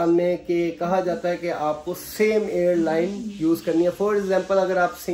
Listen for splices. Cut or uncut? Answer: uncut